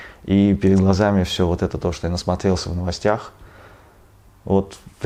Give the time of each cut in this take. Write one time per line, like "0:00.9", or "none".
none